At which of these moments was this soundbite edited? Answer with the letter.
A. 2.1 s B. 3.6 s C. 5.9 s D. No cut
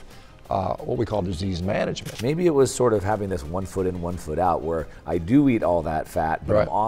A